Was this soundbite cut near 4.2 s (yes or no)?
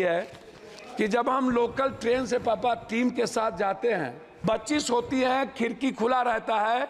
yes